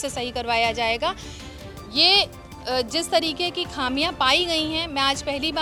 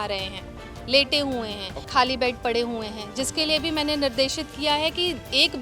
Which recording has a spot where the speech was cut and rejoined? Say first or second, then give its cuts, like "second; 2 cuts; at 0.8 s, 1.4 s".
second; 1 cut; at 1.8 s